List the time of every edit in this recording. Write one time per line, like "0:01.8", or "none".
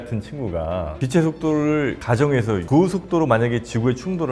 0:01.0